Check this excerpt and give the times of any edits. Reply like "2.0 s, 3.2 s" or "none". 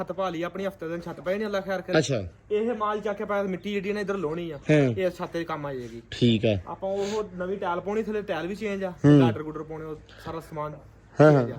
none

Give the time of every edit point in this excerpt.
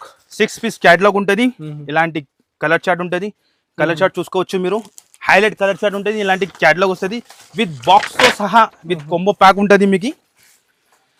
none

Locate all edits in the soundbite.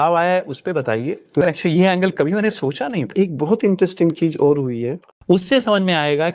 1.4 s, 5.0 s

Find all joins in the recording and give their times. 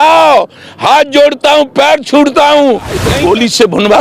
3.1 s

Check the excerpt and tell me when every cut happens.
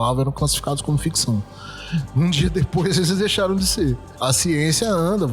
4.1 s

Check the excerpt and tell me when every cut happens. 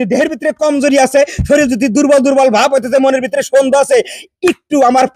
none

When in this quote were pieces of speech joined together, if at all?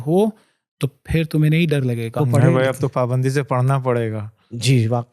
2.2 s

